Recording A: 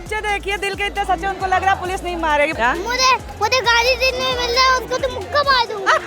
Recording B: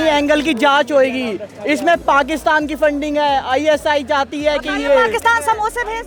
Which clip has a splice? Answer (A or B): A